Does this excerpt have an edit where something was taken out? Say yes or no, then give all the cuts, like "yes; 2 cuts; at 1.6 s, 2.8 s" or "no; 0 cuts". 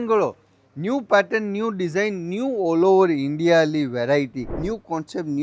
yes; 1 cut; at 4.5 s